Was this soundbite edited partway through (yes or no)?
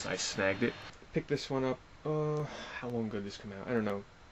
yes